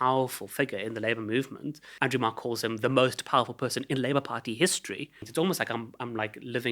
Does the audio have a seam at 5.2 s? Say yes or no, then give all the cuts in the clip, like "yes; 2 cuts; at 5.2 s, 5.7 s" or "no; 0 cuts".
yes; 2 cuts; at 1.8 s, 5.2 s